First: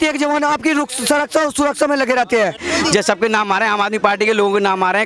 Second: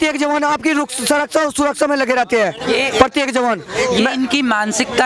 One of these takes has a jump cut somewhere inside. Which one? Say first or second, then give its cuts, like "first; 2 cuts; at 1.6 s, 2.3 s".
first; 1 cut; at 2.6 s